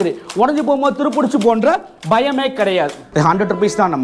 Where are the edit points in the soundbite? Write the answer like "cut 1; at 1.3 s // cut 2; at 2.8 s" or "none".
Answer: cut 1; at 3.0 s